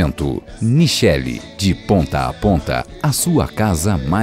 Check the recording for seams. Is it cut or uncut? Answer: uncut